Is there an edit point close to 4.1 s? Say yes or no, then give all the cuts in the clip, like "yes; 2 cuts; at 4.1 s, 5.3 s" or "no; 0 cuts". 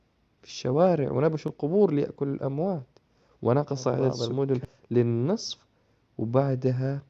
yes; 1 cut; at 4.1 s